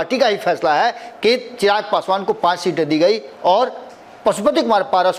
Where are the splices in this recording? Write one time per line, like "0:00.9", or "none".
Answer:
none